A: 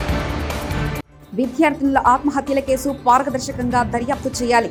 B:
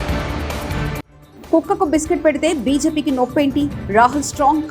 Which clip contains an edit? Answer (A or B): B